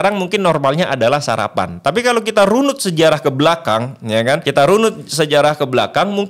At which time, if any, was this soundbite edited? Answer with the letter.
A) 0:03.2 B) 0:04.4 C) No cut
B